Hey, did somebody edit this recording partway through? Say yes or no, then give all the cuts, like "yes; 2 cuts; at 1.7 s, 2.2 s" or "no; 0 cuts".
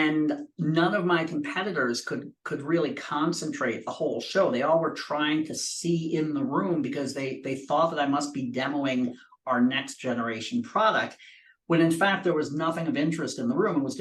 no; 0 cuts